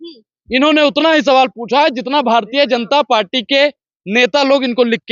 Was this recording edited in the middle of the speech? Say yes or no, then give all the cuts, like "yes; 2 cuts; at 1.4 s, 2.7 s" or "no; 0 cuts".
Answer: no; 0 cuts